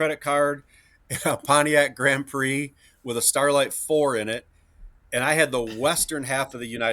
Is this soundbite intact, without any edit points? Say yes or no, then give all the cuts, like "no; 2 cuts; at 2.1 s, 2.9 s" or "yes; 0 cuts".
yes; 0 cuts